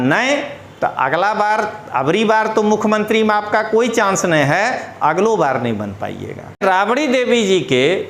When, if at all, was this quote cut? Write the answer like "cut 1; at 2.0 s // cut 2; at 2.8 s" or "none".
cut 1; at 6.6 s